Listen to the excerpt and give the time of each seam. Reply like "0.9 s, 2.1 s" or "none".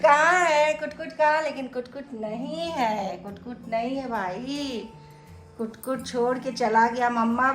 none